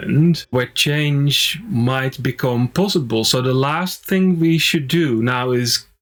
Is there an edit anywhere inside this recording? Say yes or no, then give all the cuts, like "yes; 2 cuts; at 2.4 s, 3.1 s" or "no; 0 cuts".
no; 0 cuts